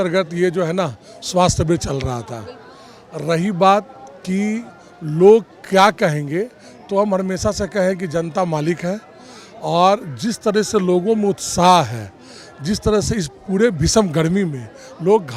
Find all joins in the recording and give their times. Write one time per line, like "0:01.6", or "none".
none